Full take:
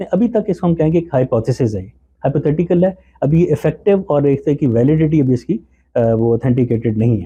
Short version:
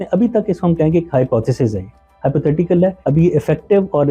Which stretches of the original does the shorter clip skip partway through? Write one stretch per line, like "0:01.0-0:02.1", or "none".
0:03.0-0:03.1